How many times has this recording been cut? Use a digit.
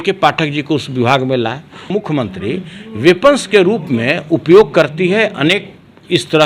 1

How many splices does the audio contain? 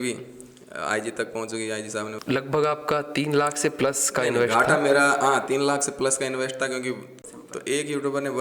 2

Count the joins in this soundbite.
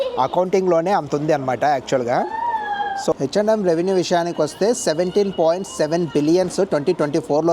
1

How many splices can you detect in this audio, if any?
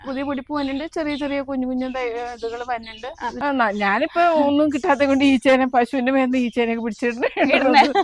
1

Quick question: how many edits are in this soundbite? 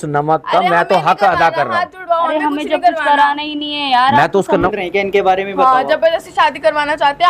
1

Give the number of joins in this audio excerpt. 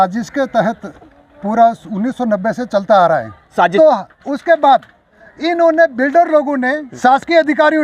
2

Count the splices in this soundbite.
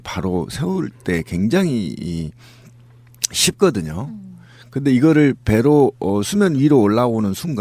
0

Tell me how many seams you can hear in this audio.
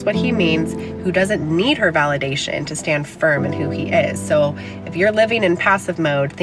0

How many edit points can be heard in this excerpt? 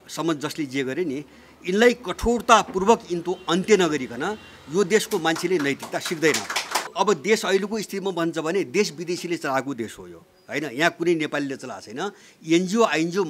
1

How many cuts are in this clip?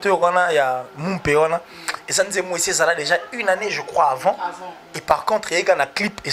0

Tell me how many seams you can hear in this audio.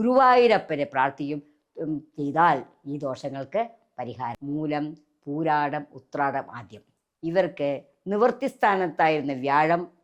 1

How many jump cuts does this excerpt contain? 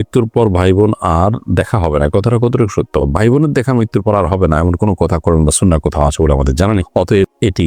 0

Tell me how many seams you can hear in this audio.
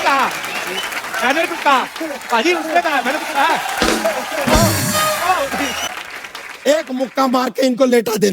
1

